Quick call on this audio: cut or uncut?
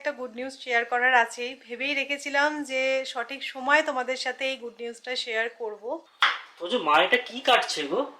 cut